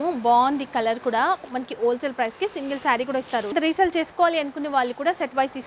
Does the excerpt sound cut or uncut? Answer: cut